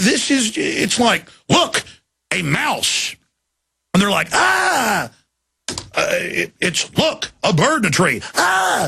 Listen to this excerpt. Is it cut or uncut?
uncut